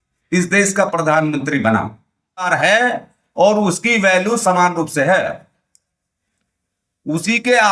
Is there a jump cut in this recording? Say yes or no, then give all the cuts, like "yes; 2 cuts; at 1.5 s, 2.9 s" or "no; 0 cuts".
yes; 1 cut; at 2.5 s